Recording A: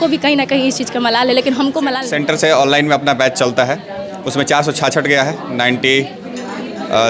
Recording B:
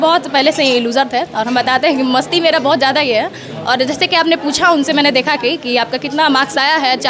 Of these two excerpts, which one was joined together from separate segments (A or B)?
A